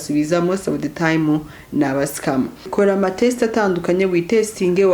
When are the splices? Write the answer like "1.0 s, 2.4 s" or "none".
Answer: 2.6 s